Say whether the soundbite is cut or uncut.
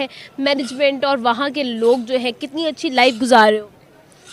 uncut